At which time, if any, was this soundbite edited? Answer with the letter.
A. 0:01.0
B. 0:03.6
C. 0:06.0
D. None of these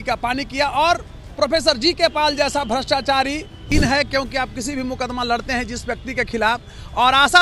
B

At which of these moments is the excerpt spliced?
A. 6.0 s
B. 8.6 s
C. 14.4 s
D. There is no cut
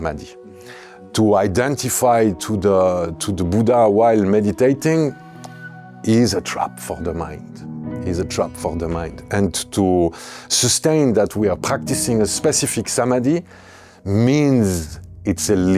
D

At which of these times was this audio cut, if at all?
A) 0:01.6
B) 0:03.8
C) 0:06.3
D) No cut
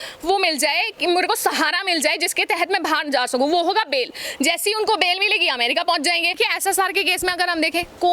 C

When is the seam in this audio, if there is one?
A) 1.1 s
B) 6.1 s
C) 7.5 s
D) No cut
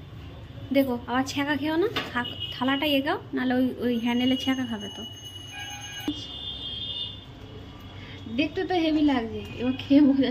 B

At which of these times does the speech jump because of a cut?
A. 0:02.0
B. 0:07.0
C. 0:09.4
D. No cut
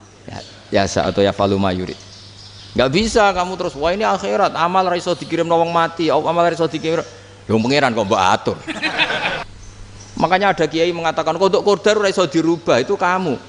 C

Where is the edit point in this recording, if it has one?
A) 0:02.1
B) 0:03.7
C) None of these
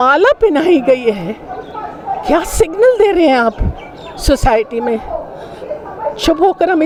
C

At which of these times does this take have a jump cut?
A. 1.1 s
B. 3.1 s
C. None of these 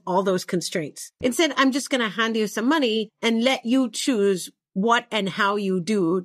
A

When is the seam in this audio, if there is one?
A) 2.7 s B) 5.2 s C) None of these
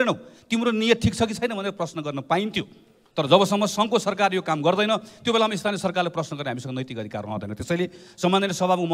C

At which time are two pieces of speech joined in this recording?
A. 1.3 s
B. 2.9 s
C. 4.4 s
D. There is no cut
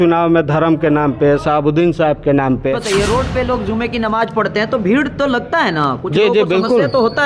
B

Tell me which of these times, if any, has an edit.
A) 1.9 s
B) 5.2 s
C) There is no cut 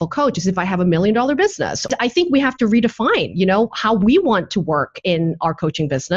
A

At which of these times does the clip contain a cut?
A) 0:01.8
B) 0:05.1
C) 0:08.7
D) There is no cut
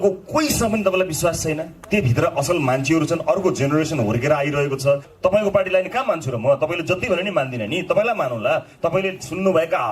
B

